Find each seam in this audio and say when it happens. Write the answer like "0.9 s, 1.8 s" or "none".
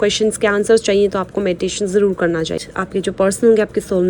2.6 s